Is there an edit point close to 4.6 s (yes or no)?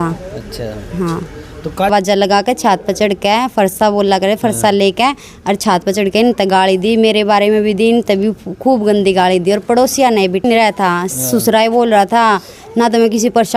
no